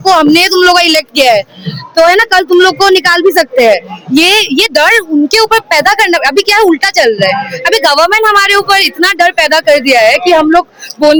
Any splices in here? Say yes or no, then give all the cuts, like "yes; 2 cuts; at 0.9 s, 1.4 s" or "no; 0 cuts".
no; 0 cuts